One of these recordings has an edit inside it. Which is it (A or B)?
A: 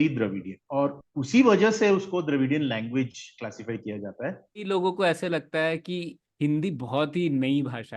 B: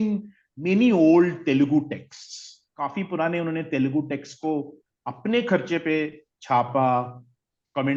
A